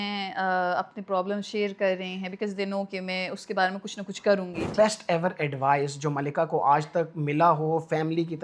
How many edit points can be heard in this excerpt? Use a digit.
1